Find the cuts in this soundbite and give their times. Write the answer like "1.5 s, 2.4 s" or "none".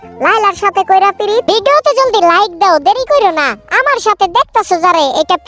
1.5 s